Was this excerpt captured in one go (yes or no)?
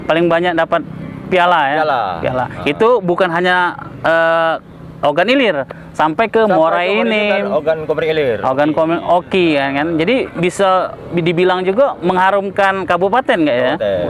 yes